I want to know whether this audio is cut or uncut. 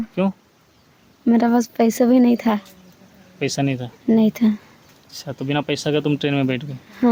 uncut